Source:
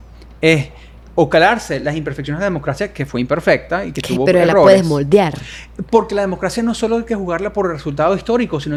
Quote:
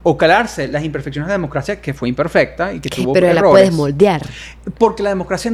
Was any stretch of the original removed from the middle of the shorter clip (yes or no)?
no